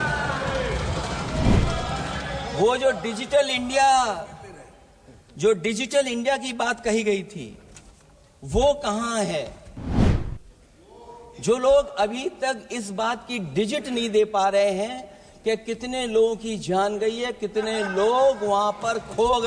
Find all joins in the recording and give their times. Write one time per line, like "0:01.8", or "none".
none